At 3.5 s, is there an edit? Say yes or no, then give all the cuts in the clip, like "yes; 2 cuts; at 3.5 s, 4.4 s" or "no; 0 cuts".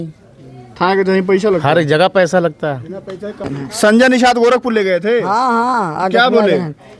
yes; 1 cut; at 3.5 s